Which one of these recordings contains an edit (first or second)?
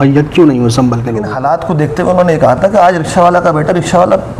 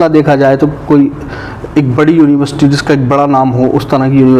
first